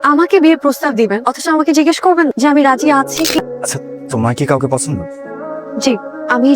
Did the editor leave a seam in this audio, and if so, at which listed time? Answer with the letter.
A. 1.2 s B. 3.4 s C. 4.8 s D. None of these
B